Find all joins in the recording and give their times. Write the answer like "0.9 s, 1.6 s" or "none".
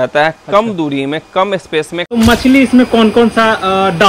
2.1 s

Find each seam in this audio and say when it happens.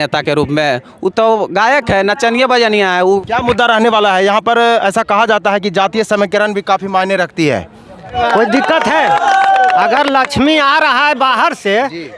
3.2 s, 8.1 s

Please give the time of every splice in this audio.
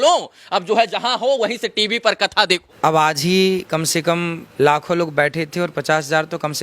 2.7 s, 4.4 s

